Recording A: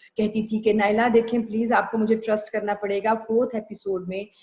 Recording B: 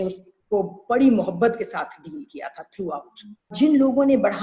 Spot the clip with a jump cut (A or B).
B